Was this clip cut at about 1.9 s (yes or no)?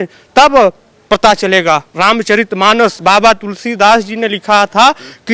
yes